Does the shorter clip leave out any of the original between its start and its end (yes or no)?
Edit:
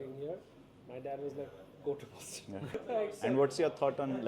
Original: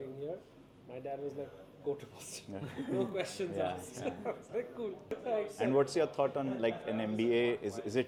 yes